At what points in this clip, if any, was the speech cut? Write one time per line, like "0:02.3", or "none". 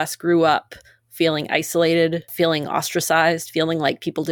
0:02.3